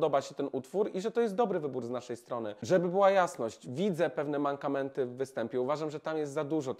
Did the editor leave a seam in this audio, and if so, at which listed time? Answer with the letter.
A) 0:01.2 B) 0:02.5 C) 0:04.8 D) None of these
B